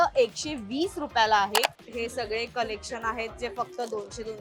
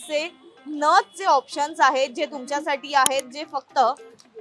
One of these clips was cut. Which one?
first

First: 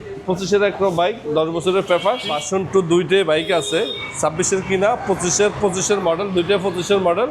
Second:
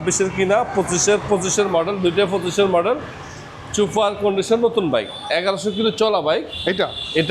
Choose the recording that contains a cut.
first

